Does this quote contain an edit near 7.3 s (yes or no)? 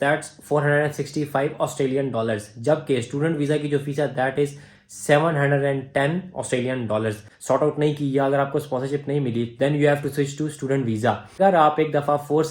yes